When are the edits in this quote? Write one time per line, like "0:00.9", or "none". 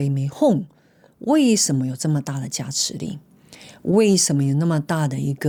none